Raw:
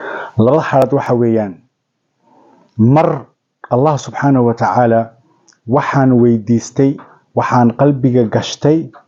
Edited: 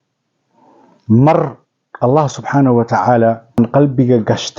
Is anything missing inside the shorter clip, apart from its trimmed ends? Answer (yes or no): yes